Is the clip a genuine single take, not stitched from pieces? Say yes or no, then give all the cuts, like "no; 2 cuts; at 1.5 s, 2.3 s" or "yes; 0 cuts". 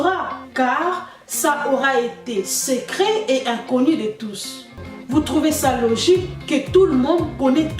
no; 1 cut; at 4.8 s